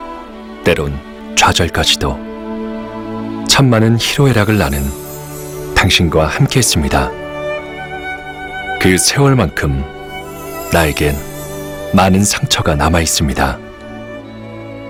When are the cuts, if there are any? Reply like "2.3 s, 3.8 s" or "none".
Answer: none